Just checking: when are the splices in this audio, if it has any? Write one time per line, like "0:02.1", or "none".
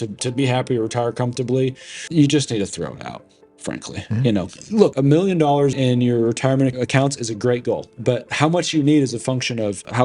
0:04.9
0:06.7